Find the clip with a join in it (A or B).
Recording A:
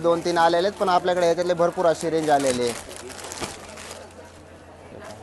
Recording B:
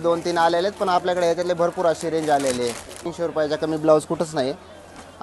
B